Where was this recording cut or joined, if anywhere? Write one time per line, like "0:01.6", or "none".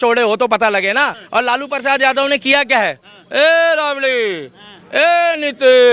0:01.2

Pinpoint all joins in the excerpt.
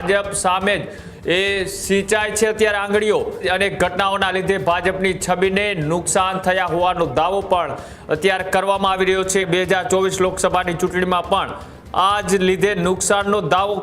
0:03.4
0:09.5

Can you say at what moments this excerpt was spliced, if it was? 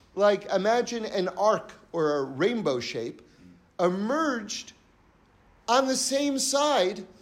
none

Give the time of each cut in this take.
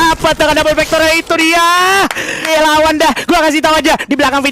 0:02.5

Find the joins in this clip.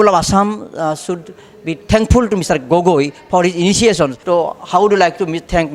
0:04.2

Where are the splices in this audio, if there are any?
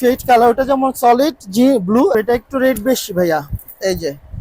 0:02.1

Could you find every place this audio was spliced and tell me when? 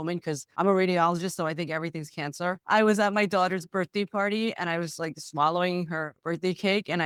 none

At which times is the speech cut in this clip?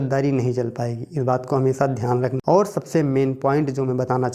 0:02.4

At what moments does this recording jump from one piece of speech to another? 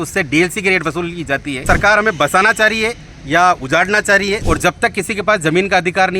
0:01.6
0:04.4

